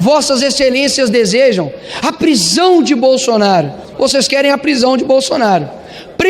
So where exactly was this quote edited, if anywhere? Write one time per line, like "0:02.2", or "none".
0:03.8